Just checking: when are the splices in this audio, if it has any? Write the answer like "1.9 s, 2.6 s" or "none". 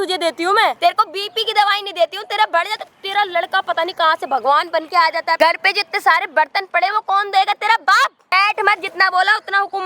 0.8 s, 5.4 s, 8.3 s